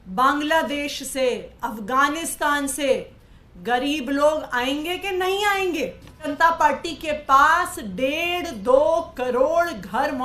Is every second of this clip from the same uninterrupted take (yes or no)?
no